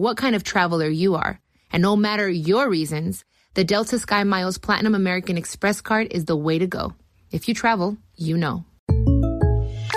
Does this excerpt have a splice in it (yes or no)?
yes